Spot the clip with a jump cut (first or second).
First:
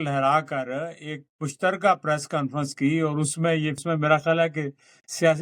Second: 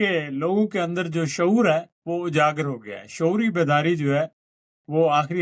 first